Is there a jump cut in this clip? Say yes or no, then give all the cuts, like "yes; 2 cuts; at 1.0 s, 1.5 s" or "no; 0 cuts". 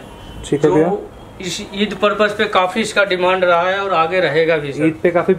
no; 0 cuts